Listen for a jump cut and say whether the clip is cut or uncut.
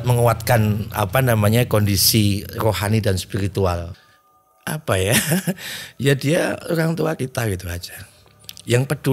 cut